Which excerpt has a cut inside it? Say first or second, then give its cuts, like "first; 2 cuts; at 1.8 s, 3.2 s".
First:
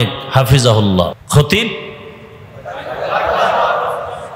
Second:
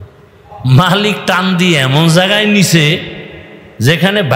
first; 1 cut; at 1.2 s